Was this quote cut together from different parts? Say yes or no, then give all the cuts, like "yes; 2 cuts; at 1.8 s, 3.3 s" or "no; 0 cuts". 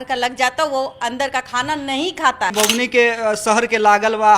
yes; 1 cut; at 2.5 s